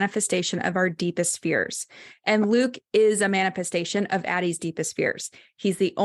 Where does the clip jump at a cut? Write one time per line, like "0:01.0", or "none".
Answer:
none